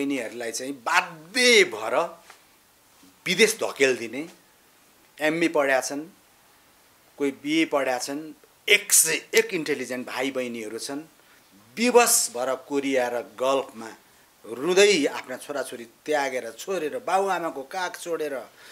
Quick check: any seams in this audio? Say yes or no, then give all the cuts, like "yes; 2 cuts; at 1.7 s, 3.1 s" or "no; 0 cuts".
no; 0 cuts